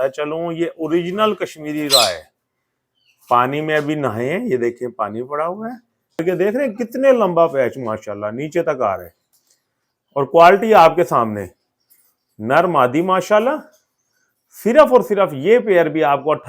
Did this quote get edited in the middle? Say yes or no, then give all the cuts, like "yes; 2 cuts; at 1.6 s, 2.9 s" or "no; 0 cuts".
yes; 1 cut; at 6.2 s